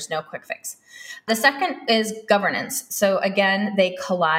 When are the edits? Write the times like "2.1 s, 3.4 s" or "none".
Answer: 1.3 s